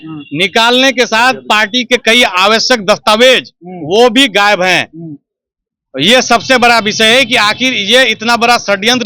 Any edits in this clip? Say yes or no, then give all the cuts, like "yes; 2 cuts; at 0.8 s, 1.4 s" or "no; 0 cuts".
no; 0 cuts